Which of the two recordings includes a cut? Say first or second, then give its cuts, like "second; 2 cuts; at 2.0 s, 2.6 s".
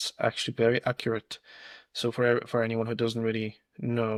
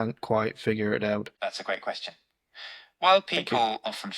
second; 1 cut; at 1.3 s